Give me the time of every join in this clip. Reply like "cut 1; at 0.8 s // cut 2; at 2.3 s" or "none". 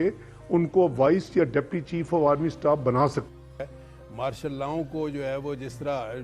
cut 1; at 3.3 s